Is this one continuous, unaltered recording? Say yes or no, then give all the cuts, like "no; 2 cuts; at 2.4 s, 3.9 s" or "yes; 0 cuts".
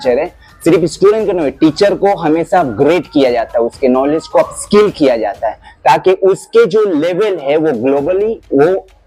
yes; 0 cuts